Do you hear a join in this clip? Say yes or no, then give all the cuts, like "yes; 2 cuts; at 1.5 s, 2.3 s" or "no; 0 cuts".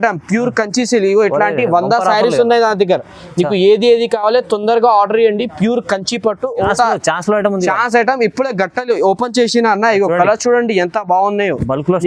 yes; 1 cut; at 6.7 s